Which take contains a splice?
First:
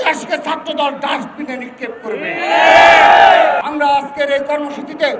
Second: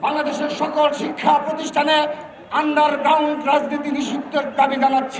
first; 1 cut; at 3.6 s

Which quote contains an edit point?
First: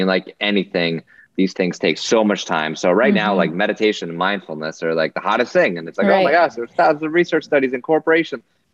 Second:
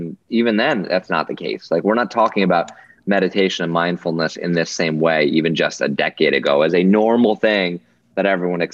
first; 1 cut; at 1.5 s

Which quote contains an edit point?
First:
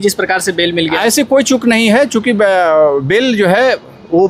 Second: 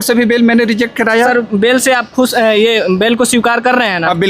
second; 1 cut; at 1.3 s

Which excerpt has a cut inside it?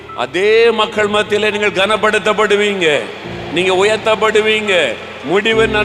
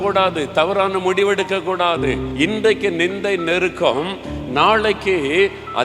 second; 1 cut; at 2.2 s

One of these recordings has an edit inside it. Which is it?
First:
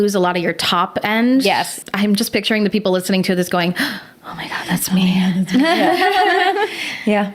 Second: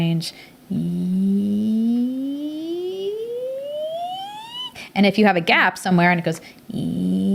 first; 1 cut; at 1.7 s

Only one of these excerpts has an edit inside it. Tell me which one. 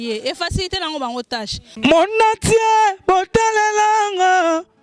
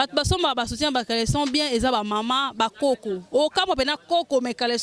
first; 1 cut; at 1.6 s

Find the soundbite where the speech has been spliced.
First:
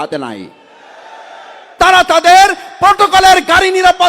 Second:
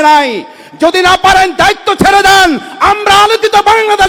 first; 1 cut; at 1.7 s

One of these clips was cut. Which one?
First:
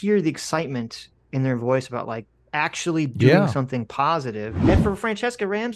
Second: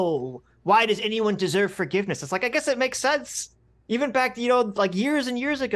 first; 1 cut; at 4.6 s

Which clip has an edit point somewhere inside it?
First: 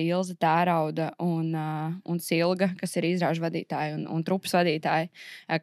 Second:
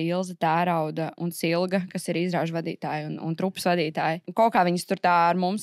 second; 2 cuts; at 1.1 s, 4.2 s

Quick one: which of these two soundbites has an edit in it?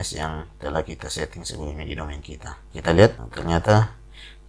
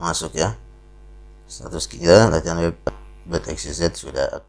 first; 2 cuts; at 2.6 s, 3.3 s

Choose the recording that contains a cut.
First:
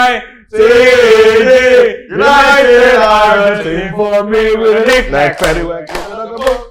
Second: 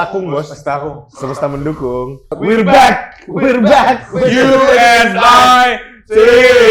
second; 1 cut; at 2.4 s

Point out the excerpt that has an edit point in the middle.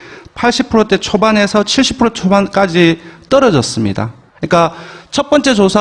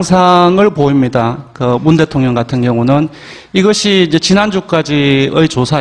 first; 1 cut; at 3.2 s

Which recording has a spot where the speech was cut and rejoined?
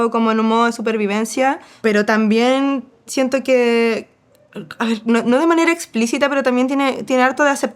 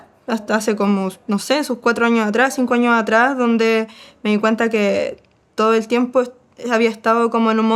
first; 1 cut; at 1.7 s

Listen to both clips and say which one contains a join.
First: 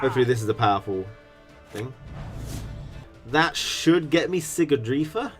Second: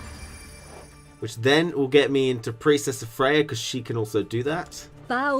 first; 1 cut; at 3.0 s

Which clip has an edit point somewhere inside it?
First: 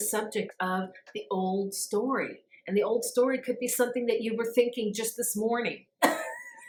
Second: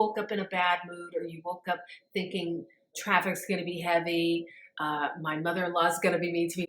second; 1 cut; at 2.8 s

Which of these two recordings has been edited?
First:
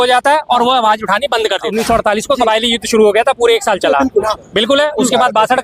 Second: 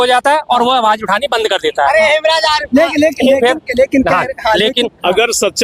first; 1 cut; at 1.7 s

